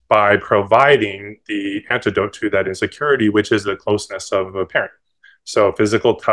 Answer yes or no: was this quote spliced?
no